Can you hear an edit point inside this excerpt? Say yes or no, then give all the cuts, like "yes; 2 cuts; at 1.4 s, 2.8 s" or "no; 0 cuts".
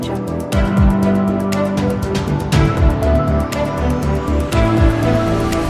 no; 0 cuts